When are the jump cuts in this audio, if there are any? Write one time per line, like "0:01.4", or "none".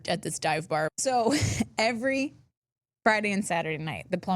0:00.9